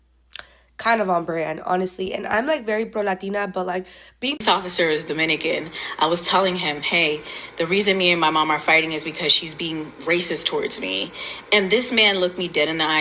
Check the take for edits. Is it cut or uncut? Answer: cut